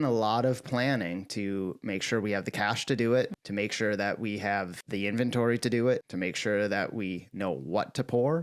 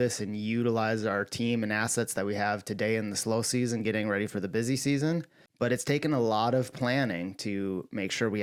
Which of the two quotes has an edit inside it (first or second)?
first